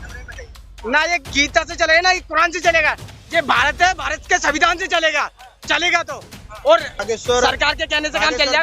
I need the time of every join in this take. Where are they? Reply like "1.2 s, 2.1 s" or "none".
7.0 s